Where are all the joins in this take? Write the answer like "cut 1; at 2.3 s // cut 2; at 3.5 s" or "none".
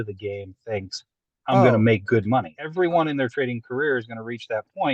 cut 1; at 2.6 s